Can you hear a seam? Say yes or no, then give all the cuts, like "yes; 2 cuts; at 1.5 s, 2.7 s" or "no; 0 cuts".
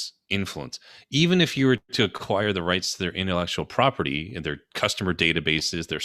no; 0 cuts